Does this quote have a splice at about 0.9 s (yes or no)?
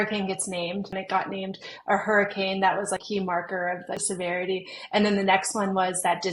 yes